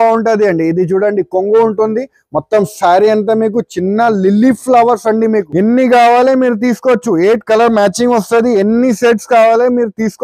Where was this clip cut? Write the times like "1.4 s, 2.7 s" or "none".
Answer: 5.4 s